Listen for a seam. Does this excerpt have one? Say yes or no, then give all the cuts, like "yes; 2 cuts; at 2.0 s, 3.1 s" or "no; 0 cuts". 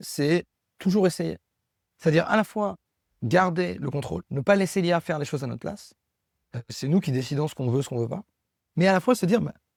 no; 0 cuts